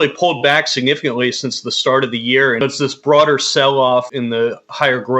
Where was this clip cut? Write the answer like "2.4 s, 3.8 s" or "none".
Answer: 2.6 s, 4.1 s